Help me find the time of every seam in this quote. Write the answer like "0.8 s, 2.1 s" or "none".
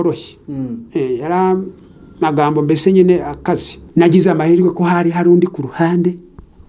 3.8 s